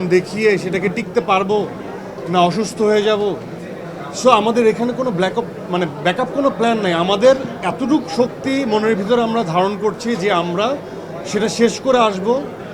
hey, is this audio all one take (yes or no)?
yes